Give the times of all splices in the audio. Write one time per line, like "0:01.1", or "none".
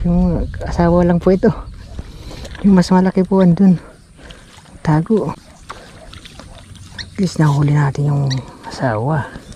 0:05.3